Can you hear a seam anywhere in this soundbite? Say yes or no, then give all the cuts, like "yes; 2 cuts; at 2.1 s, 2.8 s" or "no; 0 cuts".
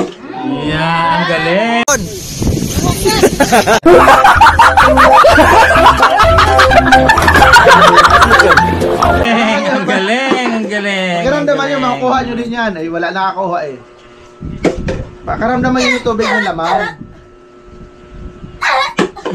no; 0 cuts